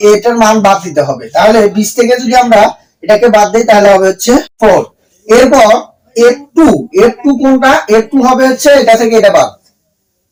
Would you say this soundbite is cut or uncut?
uncut